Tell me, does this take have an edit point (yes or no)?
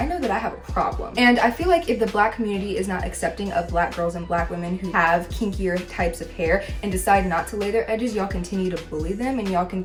no